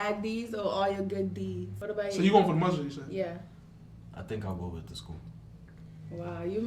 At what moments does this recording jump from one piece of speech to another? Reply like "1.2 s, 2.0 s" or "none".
1.7 s